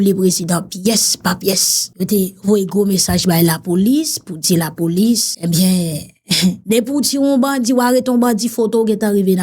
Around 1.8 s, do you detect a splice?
yes; 3 cuts; at 1.8 s, 5.3 s, 6.6 s

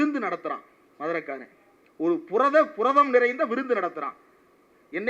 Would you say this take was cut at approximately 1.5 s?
no; 0 cuts

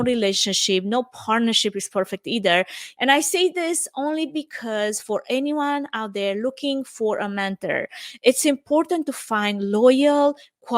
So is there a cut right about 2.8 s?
yes; 1 cut; at 2.8 s

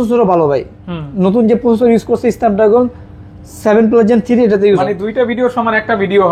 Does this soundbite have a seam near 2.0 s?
no; 1 cut; at 4.8 s

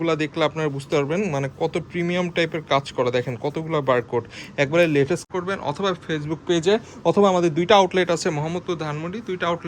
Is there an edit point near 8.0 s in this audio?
no; 1 cut; at 5.3 s

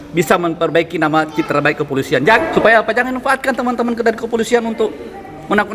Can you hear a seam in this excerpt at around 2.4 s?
yes; 1 cut; at 2.4 s

